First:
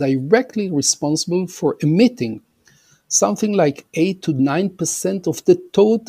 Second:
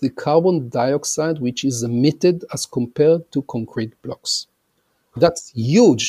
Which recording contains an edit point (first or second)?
second